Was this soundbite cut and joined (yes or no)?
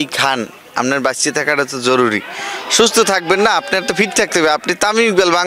no